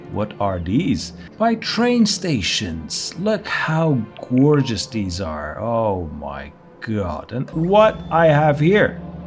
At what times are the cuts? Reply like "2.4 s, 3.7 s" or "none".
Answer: 1.3 s, 7.5 s

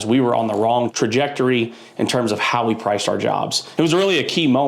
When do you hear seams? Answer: 0.9 s

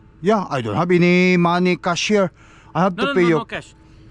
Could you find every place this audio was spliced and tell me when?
none

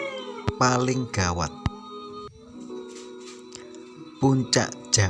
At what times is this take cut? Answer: 2.1 s, 3.6 s

